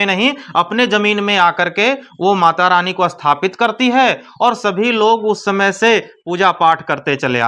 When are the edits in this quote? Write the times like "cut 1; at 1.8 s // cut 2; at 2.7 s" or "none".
none